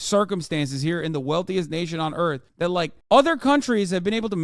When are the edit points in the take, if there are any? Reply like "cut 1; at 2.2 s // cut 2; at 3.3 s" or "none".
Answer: none